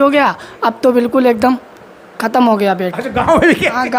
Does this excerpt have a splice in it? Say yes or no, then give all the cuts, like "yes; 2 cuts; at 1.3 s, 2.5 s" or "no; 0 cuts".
no; 0 cuts